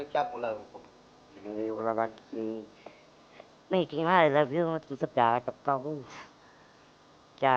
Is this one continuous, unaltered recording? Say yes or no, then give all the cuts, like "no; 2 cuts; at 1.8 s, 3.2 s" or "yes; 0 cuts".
yes; 0 cuts